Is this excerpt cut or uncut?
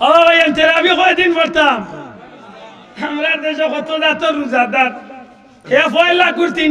uncut